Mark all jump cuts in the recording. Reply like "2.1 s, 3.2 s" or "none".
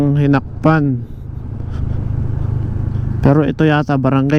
none